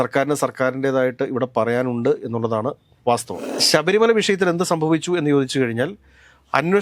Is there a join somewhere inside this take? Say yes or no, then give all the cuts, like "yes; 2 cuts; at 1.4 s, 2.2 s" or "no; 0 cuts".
yes; 1 cut; at 3.4 s